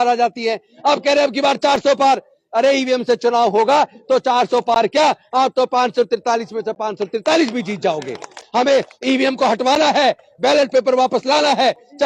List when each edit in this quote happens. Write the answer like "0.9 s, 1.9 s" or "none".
8.4 s